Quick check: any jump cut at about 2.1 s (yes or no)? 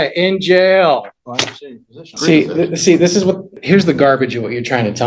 yes